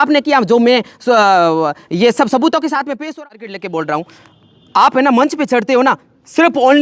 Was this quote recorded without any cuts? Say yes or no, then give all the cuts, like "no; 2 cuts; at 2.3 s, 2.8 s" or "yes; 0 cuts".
no; 1 cut; at 3.0 s